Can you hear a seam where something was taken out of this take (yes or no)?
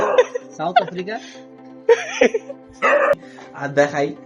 yes